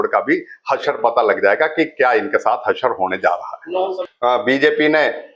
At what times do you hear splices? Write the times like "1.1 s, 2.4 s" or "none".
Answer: 4.0 s

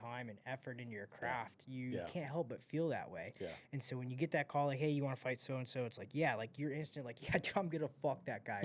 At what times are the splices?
none

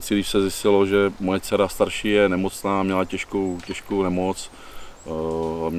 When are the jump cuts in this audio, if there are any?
none

